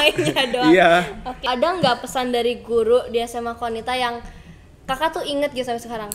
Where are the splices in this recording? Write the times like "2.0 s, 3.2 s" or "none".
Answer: 1.4 s